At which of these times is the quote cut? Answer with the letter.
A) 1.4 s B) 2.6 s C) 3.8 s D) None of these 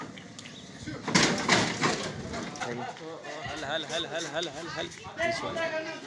B